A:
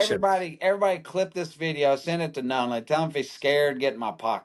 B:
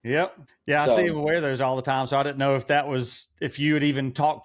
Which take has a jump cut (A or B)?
B